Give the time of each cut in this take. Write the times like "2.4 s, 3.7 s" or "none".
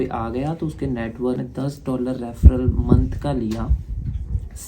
1.4 s